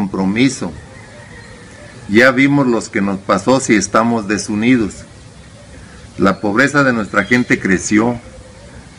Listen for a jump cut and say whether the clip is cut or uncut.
uncut